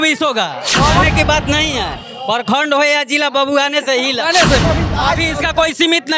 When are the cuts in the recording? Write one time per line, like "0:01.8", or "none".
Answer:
0:01.0
0:04.6

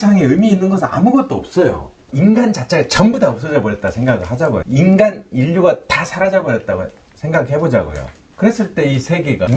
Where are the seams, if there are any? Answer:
0:02.0
0:04.6

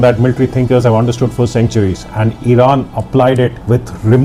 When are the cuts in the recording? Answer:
none

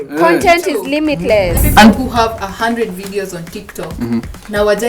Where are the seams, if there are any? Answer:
0:01.6

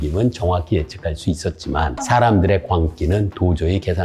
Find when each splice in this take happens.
0:02.0

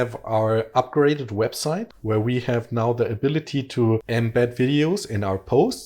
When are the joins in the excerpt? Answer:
0:01.9
0:04.1

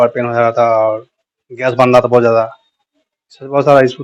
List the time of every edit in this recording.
none

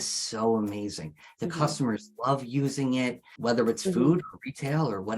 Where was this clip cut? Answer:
0:03.3

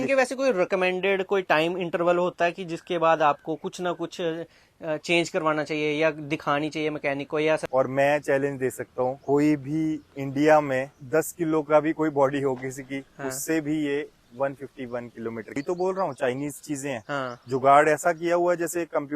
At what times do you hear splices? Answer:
0:07.6
0:09.2
0:10.1
0:10.9
0:15.6

